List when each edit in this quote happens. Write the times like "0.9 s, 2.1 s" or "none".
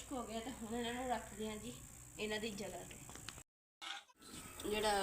4.1 s